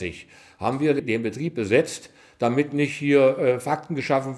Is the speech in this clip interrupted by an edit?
yes; 1 cut; at 1.0 s

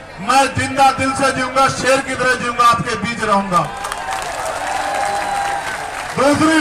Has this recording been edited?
no; 0 cuts

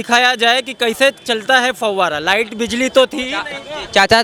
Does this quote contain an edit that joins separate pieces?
no; 0 cuts

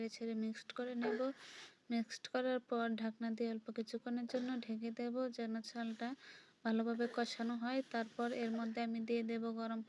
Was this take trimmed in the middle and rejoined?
yes; 1 cut; at 7.3 s

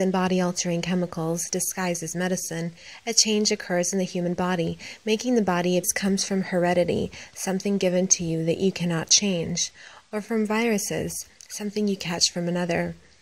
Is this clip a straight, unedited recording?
yes; 0 cuts

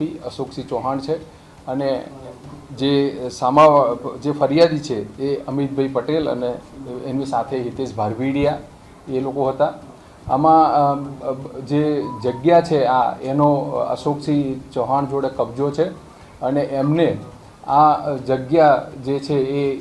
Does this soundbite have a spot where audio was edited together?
no; 0 cuts

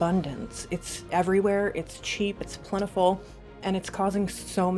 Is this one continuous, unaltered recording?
no; 1 cut; at 3.6 s

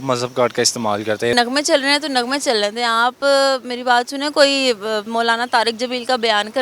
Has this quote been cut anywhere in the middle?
yes; 1 cut; at 1.3 s

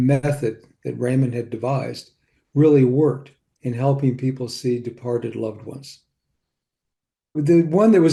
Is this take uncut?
yes; 0 cuts

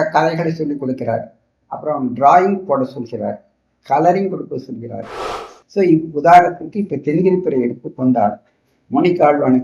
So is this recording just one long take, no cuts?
no; 1 cut; at 5.3 s

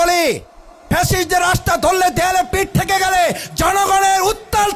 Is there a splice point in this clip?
no; 0 cuts

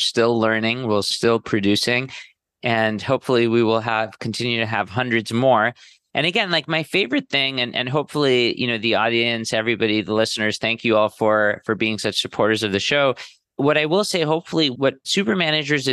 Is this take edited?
no; 0 cuts

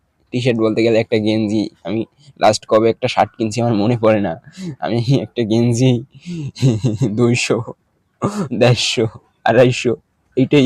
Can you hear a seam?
no; 0 cuts

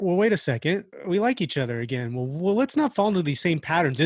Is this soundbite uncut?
no; 1 cut; at 0.9 s

